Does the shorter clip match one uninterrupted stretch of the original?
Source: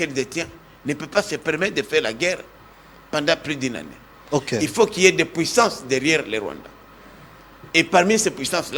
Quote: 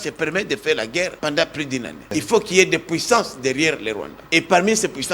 no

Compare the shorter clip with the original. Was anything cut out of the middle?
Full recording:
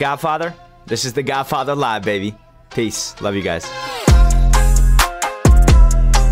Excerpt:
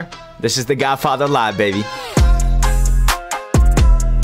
yes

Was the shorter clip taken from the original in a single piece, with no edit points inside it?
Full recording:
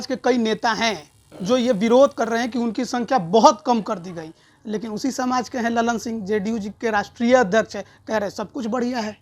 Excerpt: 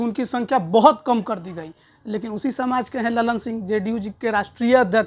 yes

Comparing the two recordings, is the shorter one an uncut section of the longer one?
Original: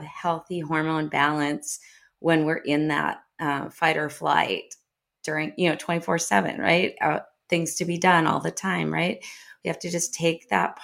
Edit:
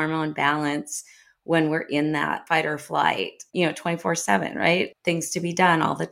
no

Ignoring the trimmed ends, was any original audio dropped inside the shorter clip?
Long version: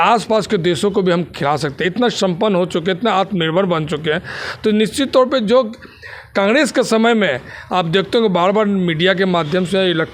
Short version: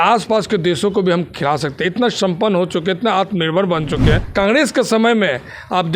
yes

